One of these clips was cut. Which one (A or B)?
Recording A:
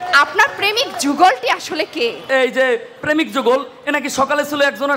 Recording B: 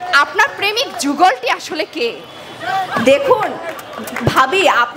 A